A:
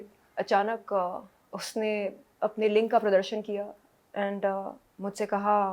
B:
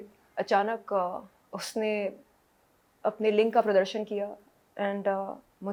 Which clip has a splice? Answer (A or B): A